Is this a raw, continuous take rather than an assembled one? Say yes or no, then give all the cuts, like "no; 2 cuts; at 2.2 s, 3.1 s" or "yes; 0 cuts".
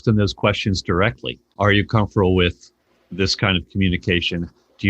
no; 1 cut; at 1.4 s